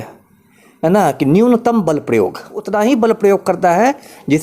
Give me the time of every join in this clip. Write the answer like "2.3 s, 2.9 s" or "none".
2.6 s